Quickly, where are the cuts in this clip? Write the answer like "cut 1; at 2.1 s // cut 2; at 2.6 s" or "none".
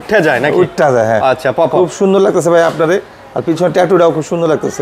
none